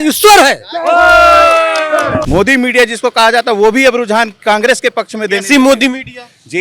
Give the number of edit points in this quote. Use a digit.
1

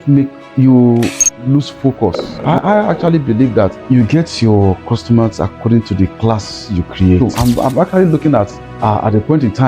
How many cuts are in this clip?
3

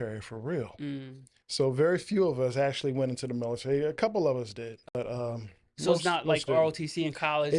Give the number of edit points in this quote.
1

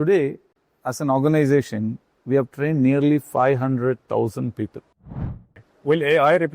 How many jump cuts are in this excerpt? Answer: 1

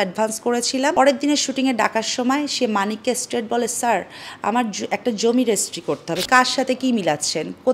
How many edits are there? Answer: 2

